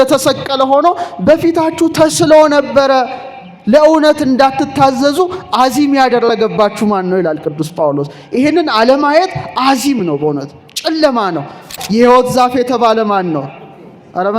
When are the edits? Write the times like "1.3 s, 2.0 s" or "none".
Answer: 11.8 s